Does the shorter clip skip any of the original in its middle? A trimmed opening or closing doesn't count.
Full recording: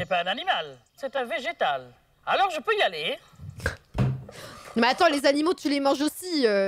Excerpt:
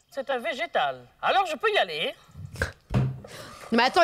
yes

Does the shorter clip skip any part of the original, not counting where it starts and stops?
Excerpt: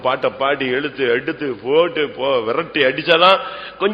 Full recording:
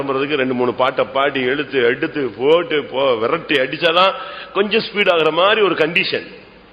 no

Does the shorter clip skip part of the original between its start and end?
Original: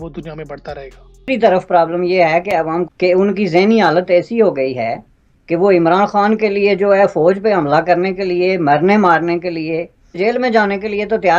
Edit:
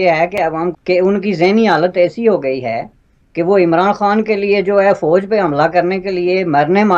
no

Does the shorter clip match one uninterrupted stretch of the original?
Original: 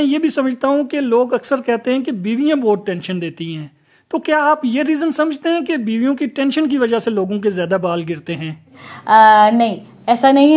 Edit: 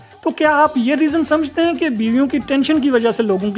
yes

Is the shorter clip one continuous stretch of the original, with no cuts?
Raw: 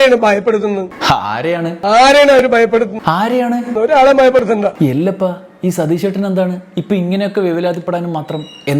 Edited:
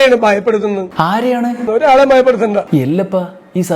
no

